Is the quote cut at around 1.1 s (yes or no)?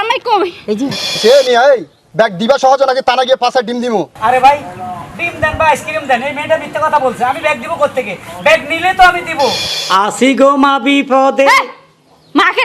yes